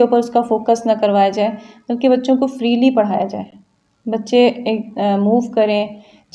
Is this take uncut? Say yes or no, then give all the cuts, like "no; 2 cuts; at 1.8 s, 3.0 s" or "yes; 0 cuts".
yes; 0 cuts